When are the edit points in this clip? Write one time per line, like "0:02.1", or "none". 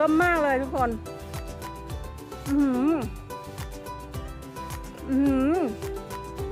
0:01.0
0:02.4